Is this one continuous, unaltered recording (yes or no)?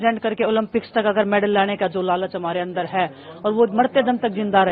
yes